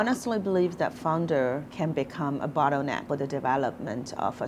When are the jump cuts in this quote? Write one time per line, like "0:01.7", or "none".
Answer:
0:01.7
0:03.0